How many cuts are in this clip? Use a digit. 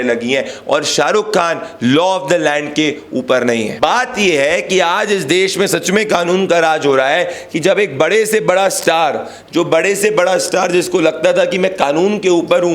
1